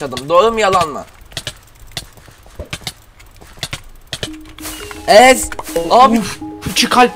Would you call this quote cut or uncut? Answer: uncut